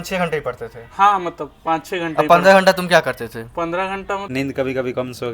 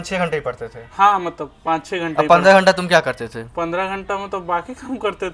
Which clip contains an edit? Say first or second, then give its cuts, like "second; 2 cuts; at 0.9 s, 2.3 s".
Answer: first; 1 cut; at 4.2 s